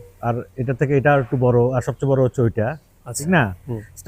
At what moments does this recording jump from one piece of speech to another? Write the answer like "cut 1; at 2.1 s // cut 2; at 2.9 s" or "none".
cut 1; at 3.1 s